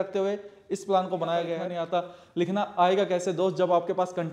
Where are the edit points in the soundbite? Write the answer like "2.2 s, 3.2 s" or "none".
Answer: 1.6 s